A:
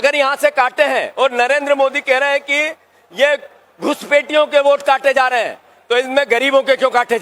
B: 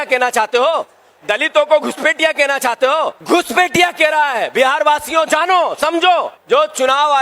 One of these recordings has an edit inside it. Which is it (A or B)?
B